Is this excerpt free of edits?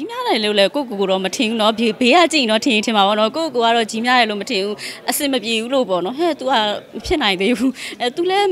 yes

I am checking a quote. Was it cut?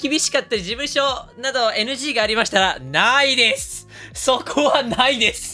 no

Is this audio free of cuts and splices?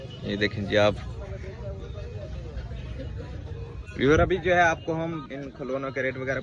no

